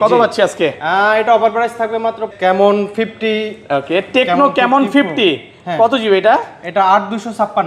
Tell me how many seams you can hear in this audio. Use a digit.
1